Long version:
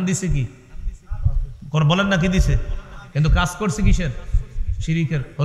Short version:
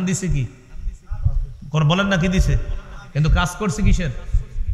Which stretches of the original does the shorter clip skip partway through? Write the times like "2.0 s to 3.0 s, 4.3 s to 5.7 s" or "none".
none